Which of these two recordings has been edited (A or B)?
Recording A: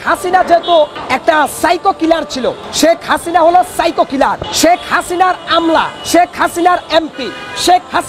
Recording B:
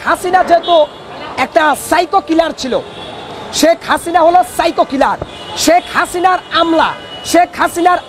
A